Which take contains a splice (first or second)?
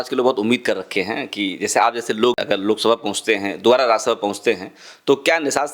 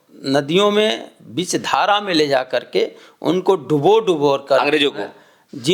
first